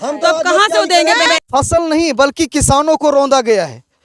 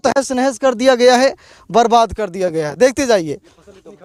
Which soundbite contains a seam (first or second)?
first